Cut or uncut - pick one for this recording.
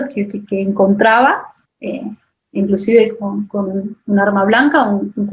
uncut